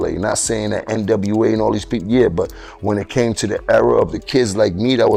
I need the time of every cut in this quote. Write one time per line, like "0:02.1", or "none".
none